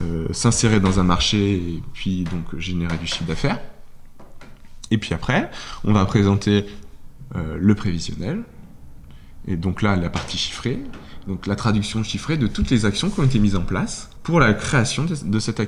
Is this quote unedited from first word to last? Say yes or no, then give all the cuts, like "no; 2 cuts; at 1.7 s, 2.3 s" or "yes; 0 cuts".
no; 1 cut; at 14.1 s